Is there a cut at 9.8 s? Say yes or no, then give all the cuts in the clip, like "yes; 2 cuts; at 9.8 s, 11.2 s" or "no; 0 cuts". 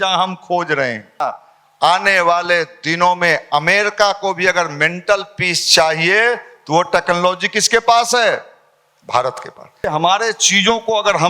yes; 2 cuts; at 1.2 s, 9.8 s